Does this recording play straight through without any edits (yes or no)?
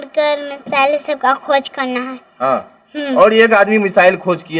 yes